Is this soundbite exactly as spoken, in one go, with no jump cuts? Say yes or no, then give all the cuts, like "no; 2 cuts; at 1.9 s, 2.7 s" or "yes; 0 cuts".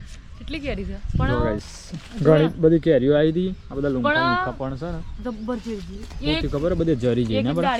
yes; 0 cuts